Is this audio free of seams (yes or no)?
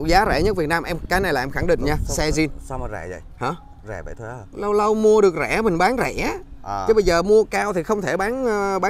yes